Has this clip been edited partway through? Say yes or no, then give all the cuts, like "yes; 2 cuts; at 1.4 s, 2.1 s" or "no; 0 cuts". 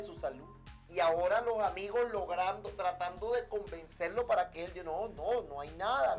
no; 0 cuts